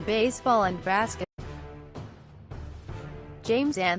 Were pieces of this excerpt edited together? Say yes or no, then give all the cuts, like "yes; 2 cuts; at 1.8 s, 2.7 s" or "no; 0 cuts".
no; 0 cuts